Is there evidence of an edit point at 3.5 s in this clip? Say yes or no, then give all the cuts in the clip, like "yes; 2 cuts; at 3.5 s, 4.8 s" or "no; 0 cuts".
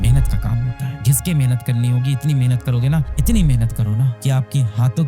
no; 1 cut; at 1.0 s